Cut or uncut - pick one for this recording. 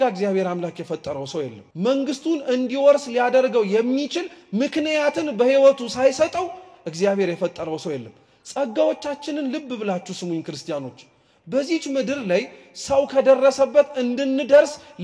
cut